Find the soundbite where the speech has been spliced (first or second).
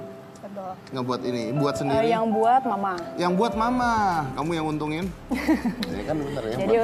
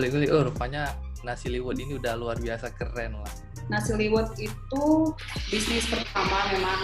second